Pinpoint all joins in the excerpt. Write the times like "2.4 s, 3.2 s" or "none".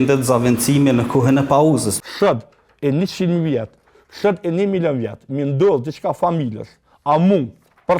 1.9 s